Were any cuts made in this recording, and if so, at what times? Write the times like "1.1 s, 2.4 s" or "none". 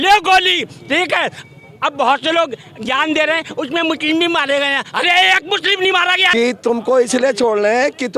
6.3 s